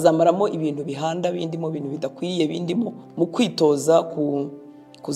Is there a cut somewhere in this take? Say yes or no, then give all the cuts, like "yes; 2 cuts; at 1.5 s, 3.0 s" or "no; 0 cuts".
yes; 1 cut; at 3.0 s